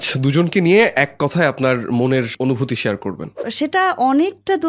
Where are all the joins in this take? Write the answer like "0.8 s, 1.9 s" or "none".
2.3 s, 3.5 s